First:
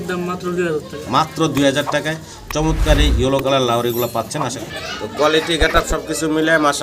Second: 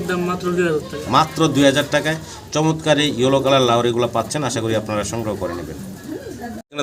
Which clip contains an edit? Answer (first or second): first